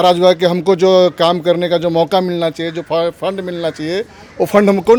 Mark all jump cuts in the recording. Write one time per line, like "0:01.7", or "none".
none